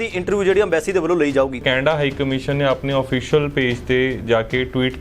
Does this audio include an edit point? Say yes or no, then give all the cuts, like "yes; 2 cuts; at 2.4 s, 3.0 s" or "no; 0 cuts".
yes; 1 cut; at 1.6 s